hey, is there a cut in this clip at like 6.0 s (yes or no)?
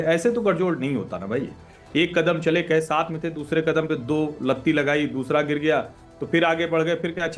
no